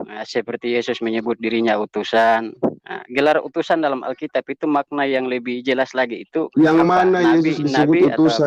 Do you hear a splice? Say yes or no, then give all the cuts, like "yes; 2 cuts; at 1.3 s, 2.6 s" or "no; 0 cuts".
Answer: no; 0 cuts